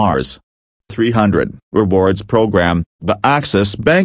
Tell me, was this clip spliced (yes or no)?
yes